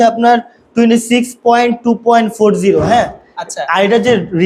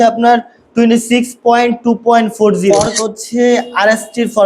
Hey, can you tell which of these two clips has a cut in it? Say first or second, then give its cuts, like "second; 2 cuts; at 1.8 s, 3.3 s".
second; 1 cut; at 2.7 s